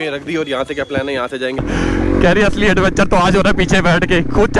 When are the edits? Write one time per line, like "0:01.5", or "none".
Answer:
0:01.6